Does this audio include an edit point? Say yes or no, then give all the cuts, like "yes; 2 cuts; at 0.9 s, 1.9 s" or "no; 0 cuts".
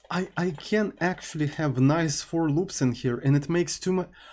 no; 0 cuts